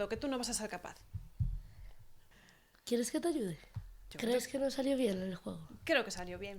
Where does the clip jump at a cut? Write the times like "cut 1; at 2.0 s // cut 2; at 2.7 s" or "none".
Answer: none